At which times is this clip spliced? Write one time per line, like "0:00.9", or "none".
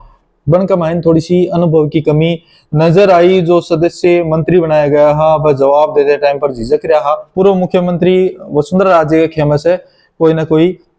0:07.3